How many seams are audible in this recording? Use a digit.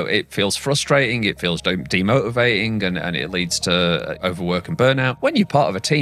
2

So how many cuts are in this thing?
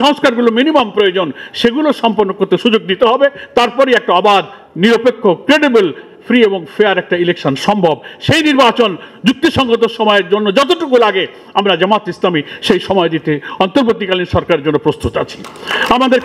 0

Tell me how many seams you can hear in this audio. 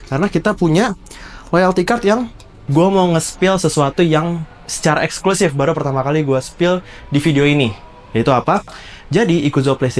1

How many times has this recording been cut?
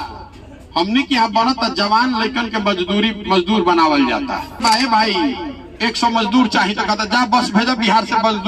1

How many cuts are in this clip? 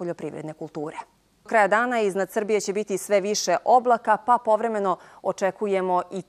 1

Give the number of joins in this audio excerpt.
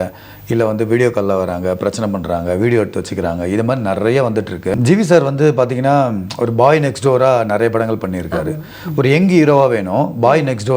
1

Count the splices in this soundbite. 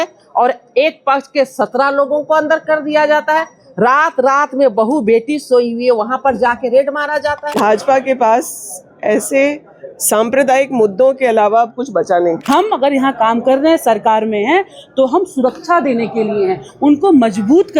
2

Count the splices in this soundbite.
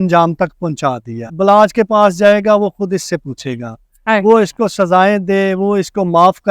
1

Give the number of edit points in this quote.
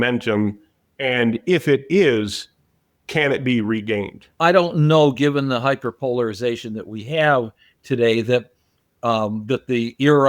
1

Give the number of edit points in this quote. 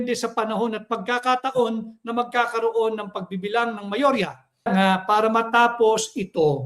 1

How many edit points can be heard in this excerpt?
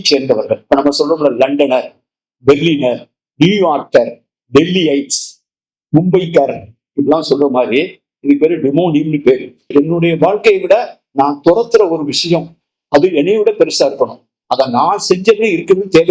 1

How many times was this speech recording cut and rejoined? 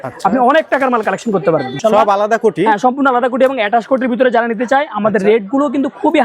1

